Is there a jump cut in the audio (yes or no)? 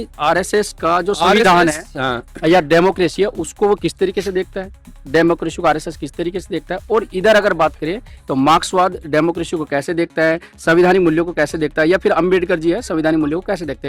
no